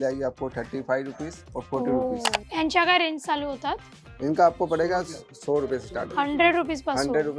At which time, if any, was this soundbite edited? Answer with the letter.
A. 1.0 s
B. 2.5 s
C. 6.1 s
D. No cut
B